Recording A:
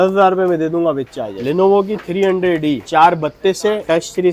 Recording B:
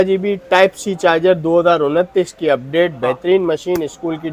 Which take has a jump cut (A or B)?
A